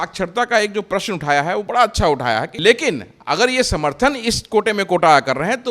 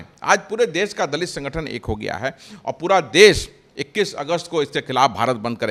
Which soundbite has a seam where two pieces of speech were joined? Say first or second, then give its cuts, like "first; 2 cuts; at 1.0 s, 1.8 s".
first; 1 cut; at 2.5 s